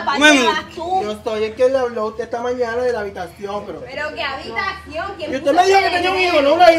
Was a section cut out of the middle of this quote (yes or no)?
no